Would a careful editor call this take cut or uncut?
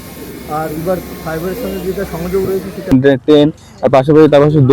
cut